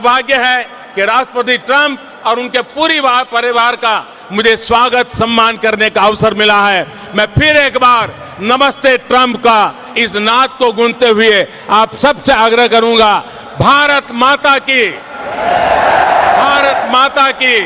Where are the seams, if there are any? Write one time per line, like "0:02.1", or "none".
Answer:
none